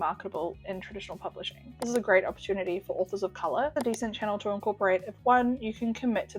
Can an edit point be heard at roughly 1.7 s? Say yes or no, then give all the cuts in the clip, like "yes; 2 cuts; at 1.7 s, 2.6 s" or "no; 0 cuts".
yes; 2 cuts; at 1.7 s, 3.8 s